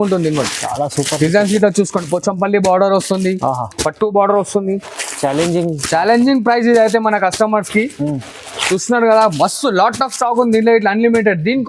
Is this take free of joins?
yes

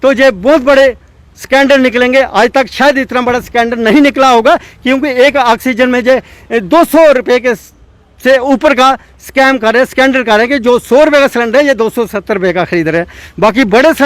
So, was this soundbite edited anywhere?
no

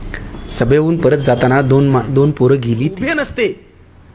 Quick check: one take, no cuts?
no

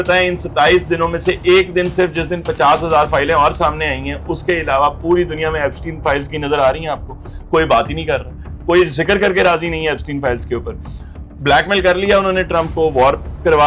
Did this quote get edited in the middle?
no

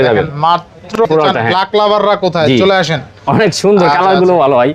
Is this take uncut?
no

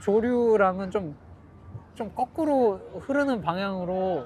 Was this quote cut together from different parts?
no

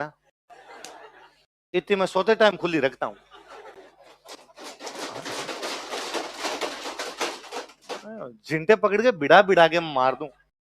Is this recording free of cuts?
yes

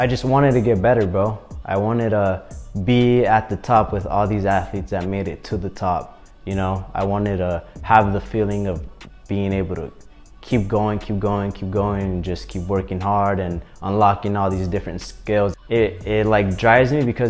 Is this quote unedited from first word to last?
no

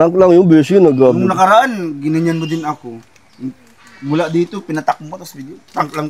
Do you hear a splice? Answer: no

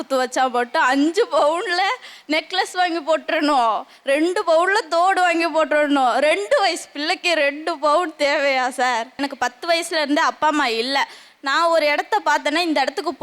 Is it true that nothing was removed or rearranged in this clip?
no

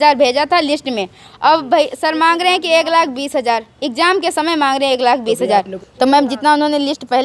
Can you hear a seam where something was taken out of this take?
yes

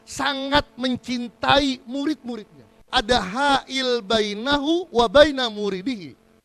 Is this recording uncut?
no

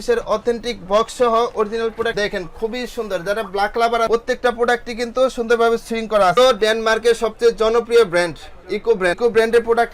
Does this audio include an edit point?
yes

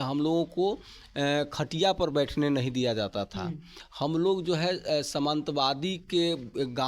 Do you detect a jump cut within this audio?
no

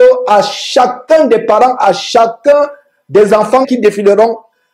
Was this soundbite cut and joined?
yes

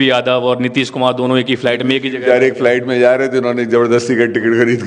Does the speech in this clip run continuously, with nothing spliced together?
yes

